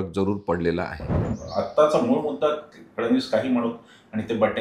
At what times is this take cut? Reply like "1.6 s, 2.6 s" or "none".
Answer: 1.2 s